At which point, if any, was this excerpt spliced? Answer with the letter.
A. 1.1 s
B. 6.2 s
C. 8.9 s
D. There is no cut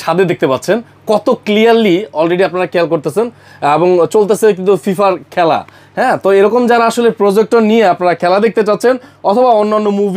D